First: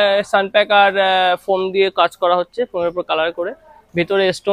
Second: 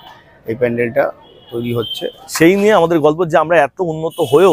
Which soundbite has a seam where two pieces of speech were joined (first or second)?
second